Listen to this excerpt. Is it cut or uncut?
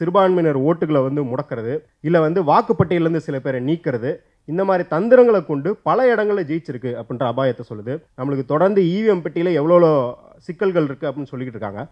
cut